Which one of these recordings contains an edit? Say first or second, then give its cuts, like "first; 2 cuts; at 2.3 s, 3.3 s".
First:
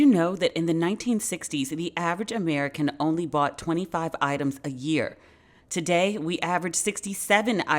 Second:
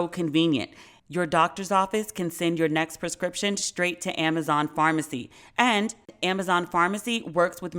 second; 1 cut; at 0.9 s